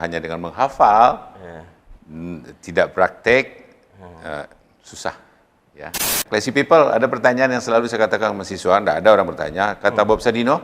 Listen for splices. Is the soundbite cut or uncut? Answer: cut